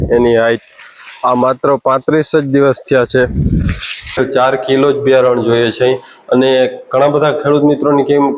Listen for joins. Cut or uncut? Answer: cut